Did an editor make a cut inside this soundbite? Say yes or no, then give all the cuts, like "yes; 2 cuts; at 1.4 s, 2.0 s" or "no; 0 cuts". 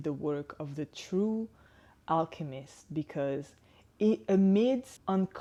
no; 0 cuts